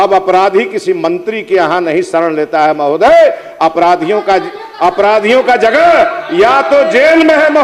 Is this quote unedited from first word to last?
yes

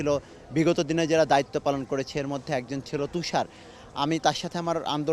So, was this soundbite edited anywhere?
no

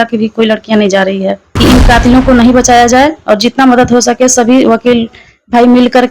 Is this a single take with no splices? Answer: no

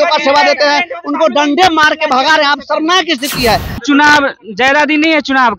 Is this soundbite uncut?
no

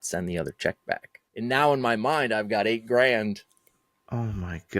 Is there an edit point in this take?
yes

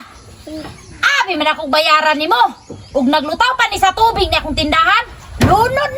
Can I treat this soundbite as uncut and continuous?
yes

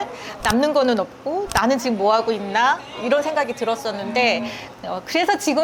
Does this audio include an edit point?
yes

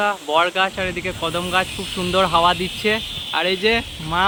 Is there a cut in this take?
no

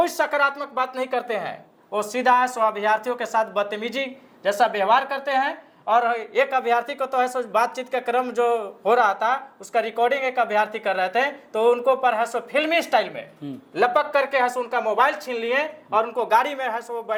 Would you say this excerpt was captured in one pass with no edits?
yes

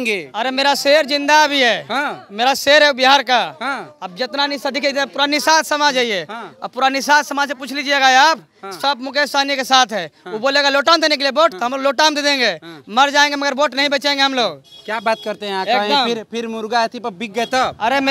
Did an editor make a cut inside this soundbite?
no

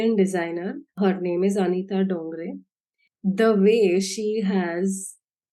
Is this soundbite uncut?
no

